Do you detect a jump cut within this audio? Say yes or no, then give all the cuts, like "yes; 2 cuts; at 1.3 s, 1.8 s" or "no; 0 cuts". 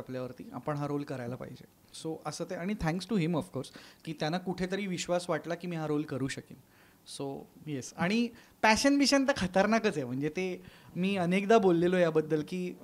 no; 0 cuts